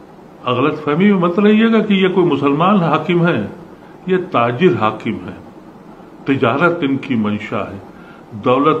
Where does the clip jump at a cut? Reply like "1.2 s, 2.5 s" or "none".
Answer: none